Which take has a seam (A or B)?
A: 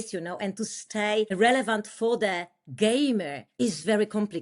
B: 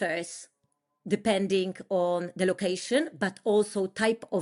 A